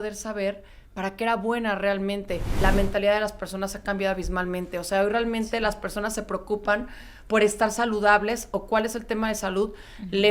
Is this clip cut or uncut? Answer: cut